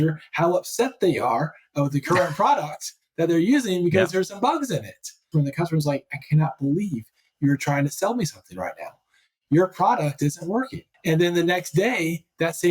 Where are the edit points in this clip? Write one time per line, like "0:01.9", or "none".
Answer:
0:05.3
0:10.8